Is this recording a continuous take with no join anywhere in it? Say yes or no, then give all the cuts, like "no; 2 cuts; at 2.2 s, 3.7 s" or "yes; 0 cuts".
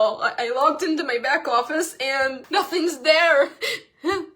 no; 1 cut; at 2.4 s